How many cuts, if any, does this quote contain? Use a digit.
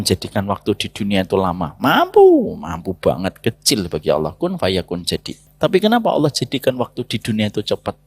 1